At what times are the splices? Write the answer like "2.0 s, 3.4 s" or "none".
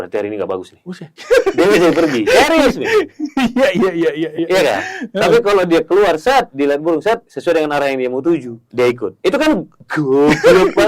7.3 s, 8.6 s, 9.8 s